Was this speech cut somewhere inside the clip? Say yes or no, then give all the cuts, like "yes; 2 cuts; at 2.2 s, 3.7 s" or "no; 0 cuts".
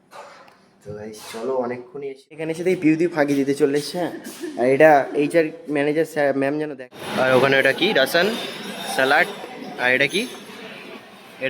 yes; 2 cuts; at 2.5 s, 7.0 s